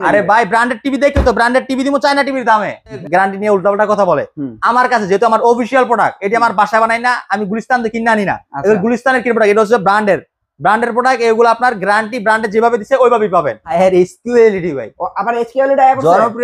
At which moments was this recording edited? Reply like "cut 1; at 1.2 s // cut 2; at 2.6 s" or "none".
cut 1; at 3.0 s // cut 2; at 13.7 s